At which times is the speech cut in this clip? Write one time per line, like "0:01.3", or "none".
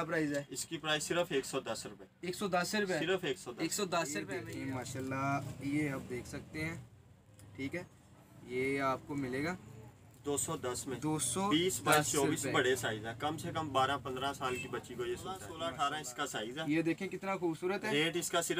0:04.3
0:15.5